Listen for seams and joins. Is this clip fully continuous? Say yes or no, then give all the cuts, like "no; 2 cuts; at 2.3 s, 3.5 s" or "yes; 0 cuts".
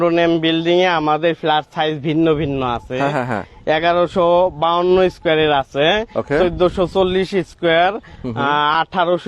yes; 0 cuts